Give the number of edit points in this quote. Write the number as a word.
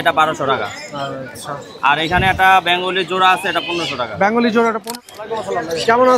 one